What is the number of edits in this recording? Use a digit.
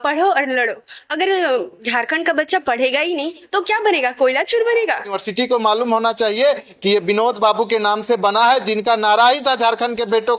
1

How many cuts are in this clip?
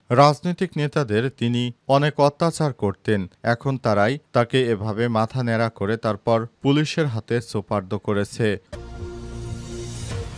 1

